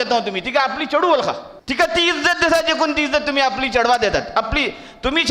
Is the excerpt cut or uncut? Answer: cut